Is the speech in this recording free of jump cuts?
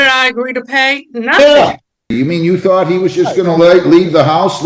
no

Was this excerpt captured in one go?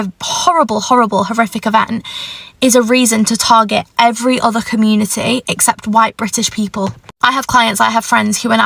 yes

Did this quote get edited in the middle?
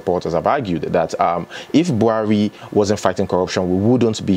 no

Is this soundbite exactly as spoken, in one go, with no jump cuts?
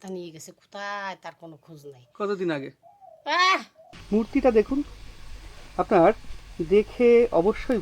no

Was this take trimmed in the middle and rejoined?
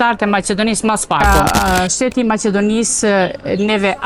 yes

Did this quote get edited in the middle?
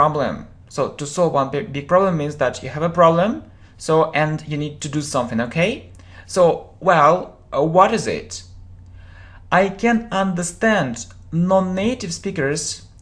yes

